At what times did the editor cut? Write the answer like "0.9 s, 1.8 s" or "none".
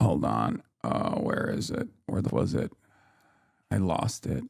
2.3 s